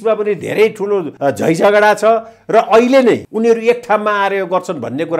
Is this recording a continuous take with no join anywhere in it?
no; 2 cuts; at 1.1 s, 3.3 s

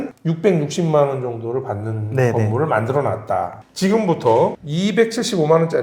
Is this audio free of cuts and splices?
no; 1 cut; at 3.6 s

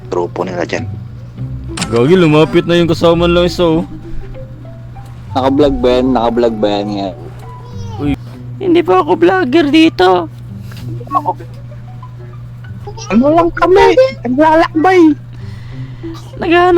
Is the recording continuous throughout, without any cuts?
no; 2 cuts; at 1.7 s, 8.2 s

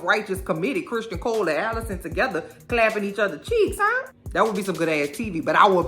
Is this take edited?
yes; 1 cut; at 4.1 s

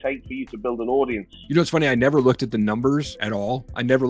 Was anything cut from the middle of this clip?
yes; 2 cuts; at 1.3 s, 3.2 s

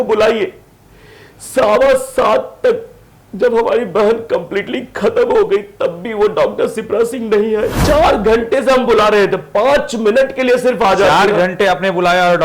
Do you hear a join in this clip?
yes; 1 cut; at 7.8 s

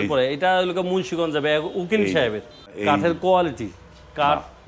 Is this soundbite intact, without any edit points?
no; 1 cut; at 2.7 s

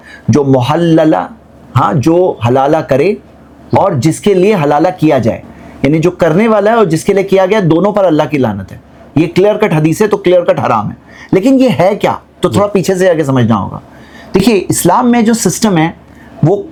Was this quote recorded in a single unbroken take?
yes; 0 cuts

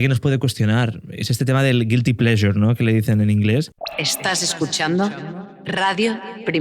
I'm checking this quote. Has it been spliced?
yes; 1 cut; at 3.7 s

